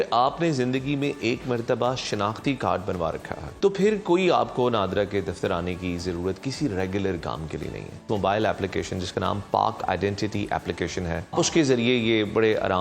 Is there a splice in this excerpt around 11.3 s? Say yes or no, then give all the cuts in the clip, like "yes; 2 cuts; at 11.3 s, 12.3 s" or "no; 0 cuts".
yes; 3 cuts; at 3.5 s, 8.0 s, 11.3 s